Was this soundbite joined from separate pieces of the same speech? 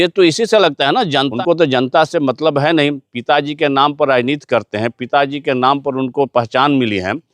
yes; 1 cut; at 1.3 s

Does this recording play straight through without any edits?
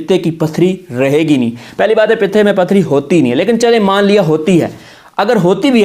yes; 0 cuts

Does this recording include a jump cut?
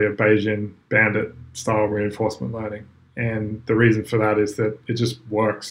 no; 0 cuts

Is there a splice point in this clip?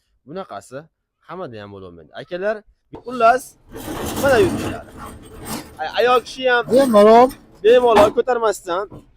yes; 1 cut; at 3.0 s

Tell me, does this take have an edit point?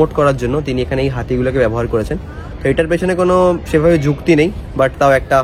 no; 0 cuts

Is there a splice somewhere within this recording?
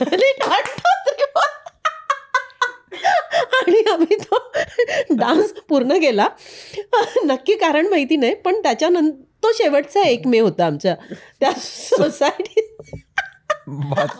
no; 0 cuts

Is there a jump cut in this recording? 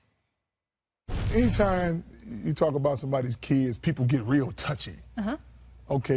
yes; 1 cut; at 2.0 s

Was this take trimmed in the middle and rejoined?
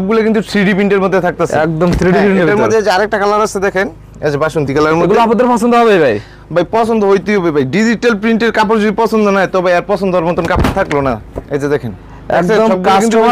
no; 0 cuts

